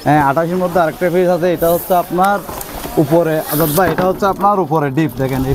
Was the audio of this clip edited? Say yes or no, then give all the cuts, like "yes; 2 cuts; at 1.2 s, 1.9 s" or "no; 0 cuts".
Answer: no; 0 cuts